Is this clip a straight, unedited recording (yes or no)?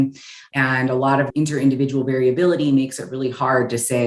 yes